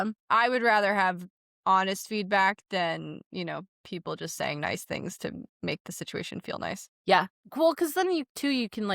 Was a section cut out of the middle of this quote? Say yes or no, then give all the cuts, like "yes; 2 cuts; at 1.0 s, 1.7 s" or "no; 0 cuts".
yes; 1 cut; at 6.9 s